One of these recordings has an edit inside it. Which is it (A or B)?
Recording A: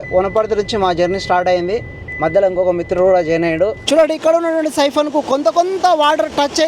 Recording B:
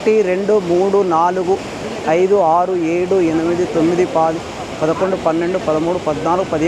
A